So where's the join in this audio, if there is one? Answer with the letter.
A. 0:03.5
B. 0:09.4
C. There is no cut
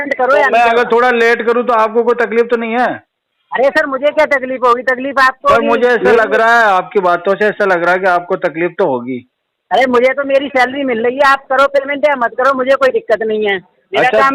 C